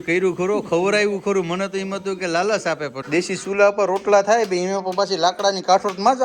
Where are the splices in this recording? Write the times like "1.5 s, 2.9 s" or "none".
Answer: 2.9 s